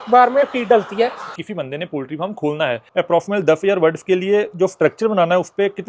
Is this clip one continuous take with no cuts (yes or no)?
no